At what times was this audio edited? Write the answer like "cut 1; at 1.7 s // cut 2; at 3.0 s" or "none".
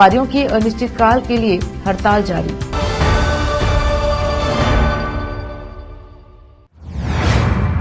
cut 1; at 6.7 s